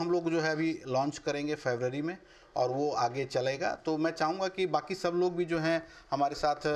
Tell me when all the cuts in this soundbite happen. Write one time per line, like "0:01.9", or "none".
none